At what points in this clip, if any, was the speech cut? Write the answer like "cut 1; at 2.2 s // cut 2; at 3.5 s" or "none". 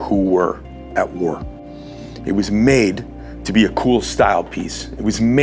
none